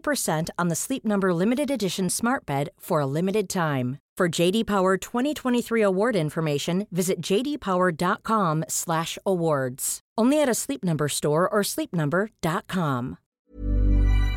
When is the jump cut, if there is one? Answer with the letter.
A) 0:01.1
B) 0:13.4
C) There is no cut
B